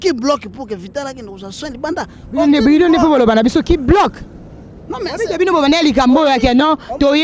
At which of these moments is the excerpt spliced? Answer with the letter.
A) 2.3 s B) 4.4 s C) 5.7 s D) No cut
D